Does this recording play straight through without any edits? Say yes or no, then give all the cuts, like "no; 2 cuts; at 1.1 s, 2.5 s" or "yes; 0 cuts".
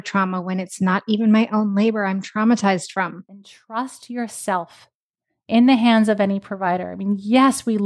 no; 1 cut; at 3.6 s